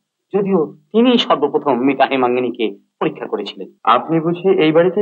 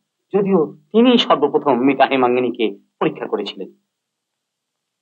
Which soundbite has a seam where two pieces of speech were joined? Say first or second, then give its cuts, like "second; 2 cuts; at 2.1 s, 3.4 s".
first; 1 cut; at 3.6 s